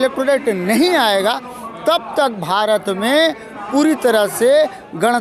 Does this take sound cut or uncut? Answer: uncut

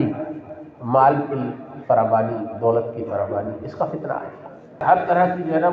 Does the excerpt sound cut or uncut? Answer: cut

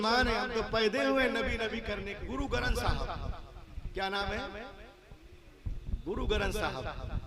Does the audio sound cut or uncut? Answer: cut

